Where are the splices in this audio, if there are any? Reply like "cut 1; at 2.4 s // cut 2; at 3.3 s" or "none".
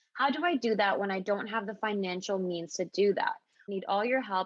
cut 1; at 3.6 s